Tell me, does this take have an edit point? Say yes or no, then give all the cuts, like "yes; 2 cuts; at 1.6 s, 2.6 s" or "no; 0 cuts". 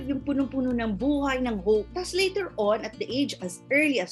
no; 0 cuts